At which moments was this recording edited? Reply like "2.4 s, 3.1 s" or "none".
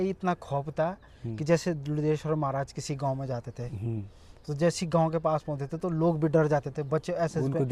none